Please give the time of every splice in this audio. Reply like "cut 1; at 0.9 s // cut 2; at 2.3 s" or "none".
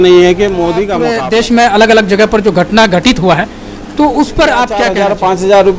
cut 1; at 1.0 s // cut 2; at 4.9 s